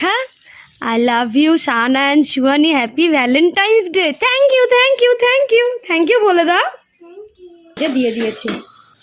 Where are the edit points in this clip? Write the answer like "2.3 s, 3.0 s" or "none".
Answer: 7.8 s